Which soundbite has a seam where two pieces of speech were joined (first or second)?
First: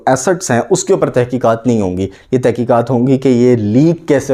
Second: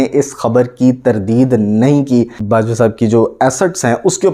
second